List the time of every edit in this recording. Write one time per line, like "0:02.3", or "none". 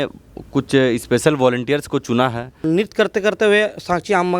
0:02.5